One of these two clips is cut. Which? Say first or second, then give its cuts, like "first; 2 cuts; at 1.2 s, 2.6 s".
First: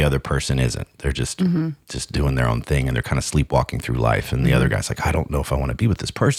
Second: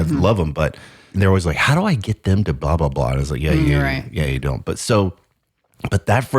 second; 1 cut; at 1.1 s